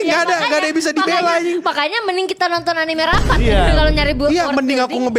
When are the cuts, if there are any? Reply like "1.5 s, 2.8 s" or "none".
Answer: none